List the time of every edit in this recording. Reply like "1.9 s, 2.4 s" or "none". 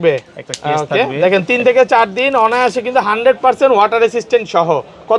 none